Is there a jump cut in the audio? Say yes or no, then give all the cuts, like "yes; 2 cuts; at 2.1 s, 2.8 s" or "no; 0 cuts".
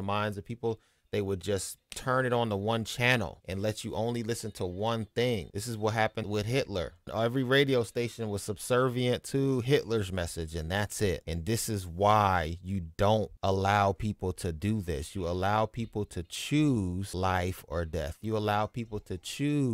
no; 0 cuts